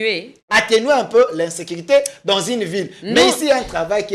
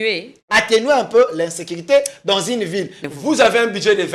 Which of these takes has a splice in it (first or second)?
second